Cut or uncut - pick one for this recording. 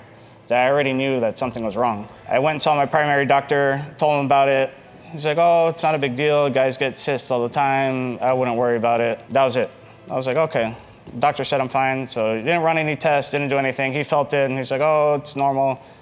uncut